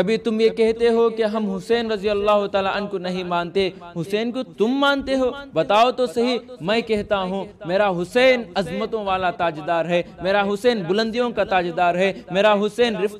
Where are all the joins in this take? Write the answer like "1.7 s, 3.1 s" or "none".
none

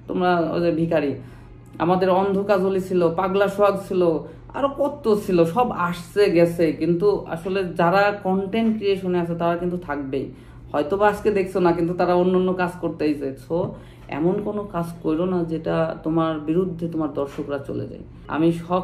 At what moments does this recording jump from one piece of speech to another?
none

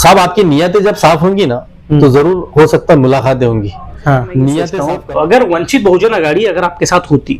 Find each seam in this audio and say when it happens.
4.8 s

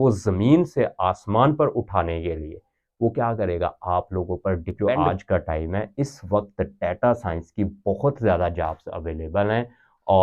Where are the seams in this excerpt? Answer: 4.8 s

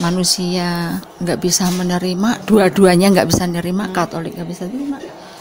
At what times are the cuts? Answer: 1.1 s

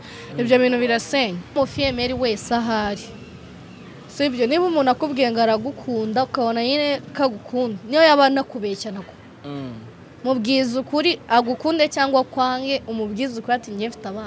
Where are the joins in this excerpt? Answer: 1.5 s

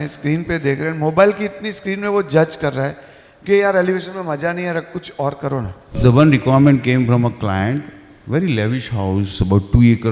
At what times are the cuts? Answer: 5.9 s

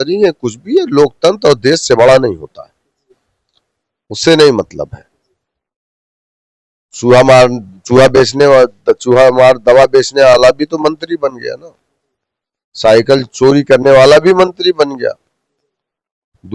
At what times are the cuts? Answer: none

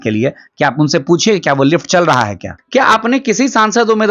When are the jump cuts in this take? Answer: 2.5 s

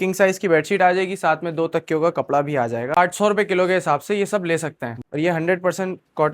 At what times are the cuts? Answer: 3.0 s, 5.0 s

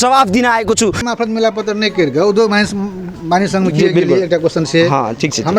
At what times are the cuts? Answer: 1.0 s

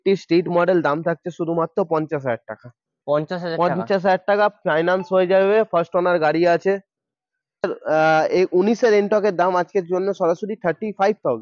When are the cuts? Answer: 7.7 s

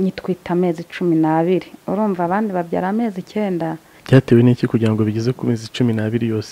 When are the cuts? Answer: 3.9 s

